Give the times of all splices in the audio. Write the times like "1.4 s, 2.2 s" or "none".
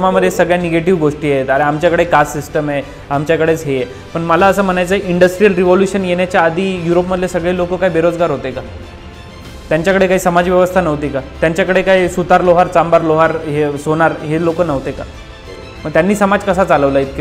none